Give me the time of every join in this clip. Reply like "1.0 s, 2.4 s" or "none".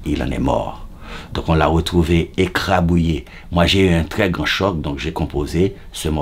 none